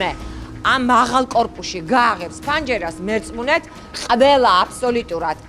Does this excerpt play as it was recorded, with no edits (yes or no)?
yes